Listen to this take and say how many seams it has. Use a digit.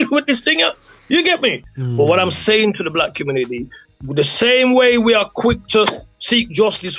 1